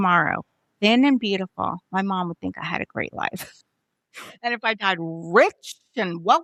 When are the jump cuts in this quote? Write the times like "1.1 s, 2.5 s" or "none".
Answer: none